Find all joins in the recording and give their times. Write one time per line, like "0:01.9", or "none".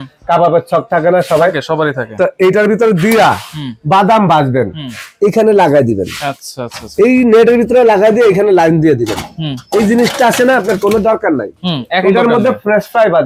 none